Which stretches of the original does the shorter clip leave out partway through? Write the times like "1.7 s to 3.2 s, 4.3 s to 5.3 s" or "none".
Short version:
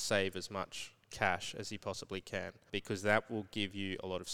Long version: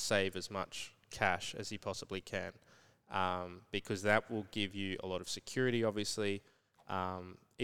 2.6 s to 3.6 s